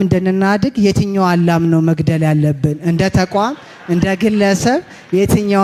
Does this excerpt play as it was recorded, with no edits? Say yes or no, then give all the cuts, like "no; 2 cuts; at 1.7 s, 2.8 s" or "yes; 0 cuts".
yes; 0 cuts